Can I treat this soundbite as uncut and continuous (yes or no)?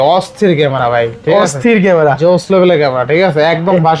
yes